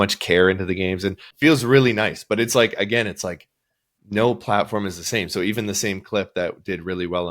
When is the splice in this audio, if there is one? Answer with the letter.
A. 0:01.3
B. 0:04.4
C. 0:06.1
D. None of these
A